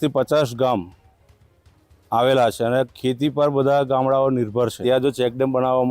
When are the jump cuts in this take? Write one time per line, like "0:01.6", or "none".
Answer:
0:04.8